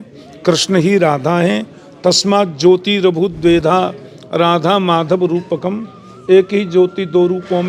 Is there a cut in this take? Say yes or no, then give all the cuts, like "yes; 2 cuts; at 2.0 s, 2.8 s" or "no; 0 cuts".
no; 0 cuts